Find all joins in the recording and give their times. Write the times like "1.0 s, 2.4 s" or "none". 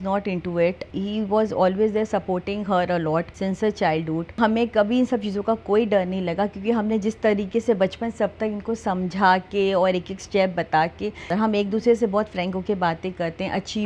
0.9 s, 3.3 s, 4.4 s, 11.3 s